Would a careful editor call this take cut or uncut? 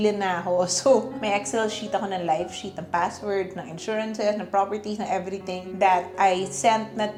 uncut